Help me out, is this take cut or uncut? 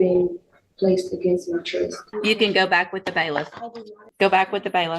cut